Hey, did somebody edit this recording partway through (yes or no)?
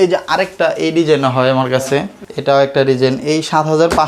no